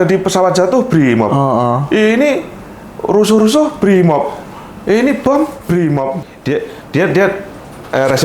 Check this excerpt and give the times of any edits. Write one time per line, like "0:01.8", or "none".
0:06.3